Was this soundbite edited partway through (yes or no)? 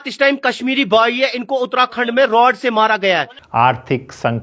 no